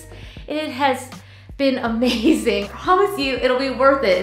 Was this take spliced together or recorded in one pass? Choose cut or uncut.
cut